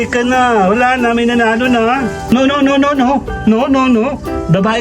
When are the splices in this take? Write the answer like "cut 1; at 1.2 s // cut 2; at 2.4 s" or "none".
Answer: cut 1; at 2.3 s

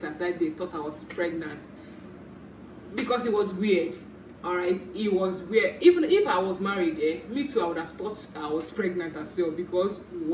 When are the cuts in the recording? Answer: none

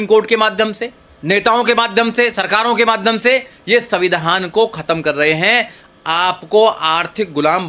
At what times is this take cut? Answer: none

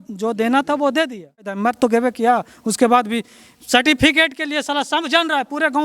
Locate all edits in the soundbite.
cut 1; at 1.6 s

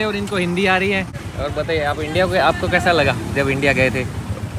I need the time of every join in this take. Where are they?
cut 1; at 1.2 s

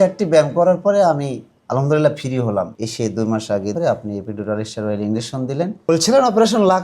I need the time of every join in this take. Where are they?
cut 1; at 2.8 s // cut 2; at 3.7 s // cut 3; at 5.8 s

